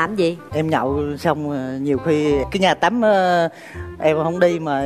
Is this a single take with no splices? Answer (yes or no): yes